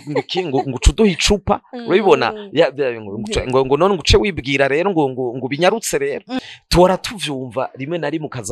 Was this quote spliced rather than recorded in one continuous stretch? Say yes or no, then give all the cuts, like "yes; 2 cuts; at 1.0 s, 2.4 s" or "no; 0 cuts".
yes; 1 cut; at 6.4 s